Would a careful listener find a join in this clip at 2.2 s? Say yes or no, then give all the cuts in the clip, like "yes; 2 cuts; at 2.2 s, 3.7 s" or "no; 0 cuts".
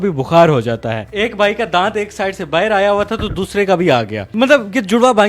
no; 0 cuts